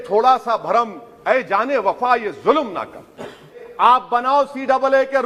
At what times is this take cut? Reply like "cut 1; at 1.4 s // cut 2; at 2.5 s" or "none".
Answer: cut 1; at 3.6 s